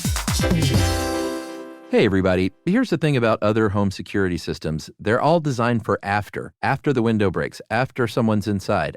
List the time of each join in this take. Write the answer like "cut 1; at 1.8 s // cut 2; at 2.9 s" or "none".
cut 1; at 1.7 s